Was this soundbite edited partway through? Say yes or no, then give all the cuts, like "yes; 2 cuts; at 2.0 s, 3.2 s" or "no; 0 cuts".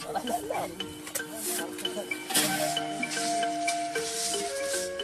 yes; 1 cut; at 2.3 s